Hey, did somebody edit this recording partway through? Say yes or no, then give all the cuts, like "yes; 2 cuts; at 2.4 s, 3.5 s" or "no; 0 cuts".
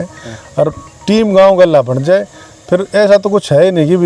no; 0 cuts